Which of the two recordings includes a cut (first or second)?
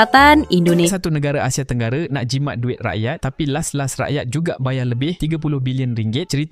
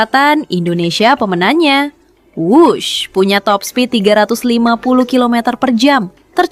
first